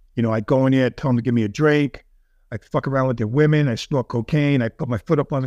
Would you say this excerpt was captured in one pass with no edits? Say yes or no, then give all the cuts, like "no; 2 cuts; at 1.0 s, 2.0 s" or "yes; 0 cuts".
yes; 0 cuts